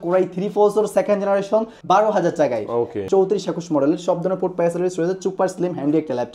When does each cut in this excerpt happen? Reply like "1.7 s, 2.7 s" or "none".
1.7 s, 3.0 s